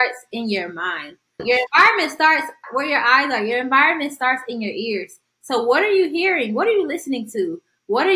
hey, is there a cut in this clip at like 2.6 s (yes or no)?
yes